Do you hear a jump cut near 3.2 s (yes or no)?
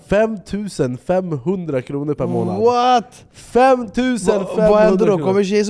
no